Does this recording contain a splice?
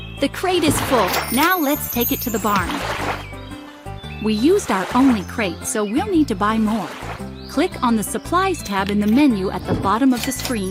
no; 0 cuts

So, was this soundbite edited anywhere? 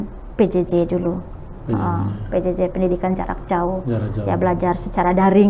no; 0 cuts

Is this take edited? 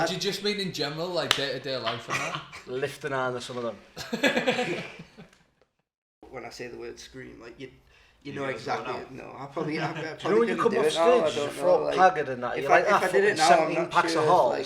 yes; 1 cut; at 6.3 s

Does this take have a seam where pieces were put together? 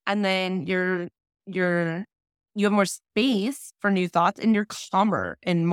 no; 0 cuts

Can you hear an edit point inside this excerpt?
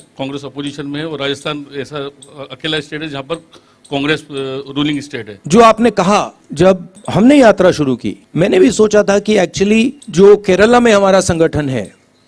yes; 4 cuts; at 5.3 s, 6.7 s, 8.2 s, 10.0 s

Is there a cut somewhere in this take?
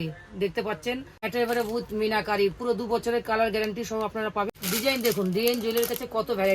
yes; 2 cuts; at 1.3 s, 4.5 s

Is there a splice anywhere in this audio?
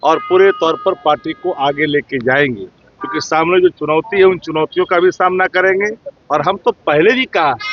no; 0 cuts

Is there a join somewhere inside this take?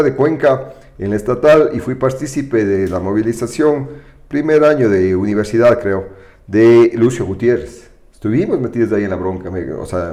no; 0 cuts

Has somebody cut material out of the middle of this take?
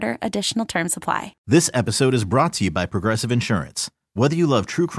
yes; 1 cut; at 1.3 s

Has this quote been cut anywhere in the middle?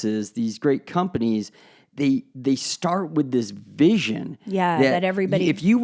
no; 0 cuts

